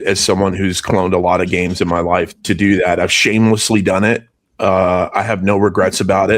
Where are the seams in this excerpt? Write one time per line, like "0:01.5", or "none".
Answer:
0:02.3